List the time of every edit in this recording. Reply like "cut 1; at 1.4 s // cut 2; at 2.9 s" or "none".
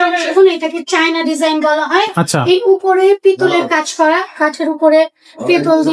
none